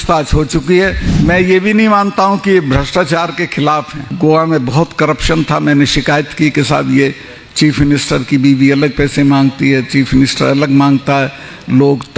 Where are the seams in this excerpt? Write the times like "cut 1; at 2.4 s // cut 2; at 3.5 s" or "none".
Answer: cut 1; at 1.1 s // cut 2; at 4.0 s